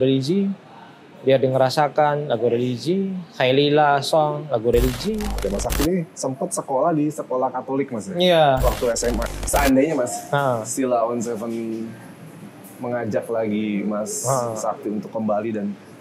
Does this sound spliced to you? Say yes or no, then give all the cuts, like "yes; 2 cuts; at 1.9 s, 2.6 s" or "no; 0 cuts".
yes; 2 cuts; at 5.4 s, 9.3 s